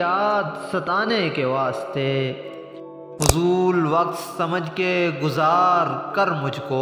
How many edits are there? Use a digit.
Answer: 1